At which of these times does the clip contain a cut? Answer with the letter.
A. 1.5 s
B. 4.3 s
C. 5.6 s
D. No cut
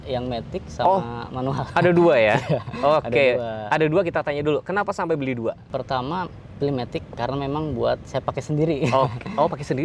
C